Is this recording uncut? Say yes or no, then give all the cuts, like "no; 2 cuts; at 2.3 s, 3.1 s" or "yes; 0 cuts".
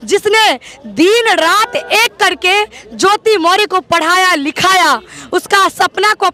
yes; 0 cuts